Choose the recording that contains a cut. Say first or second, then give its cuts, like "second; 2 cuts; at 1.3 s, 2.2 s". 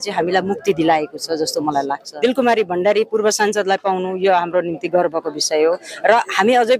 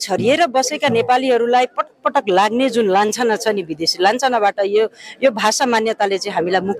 first; 1 cut; at 2.0 s